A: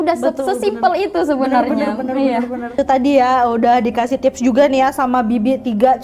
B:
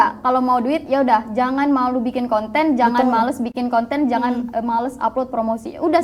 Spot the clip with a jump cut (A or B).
A